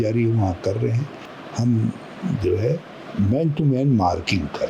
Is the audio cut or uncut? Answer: cut